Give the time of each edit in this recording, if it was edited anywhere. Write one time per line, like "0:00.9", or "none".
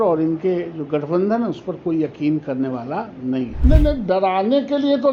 0:03.5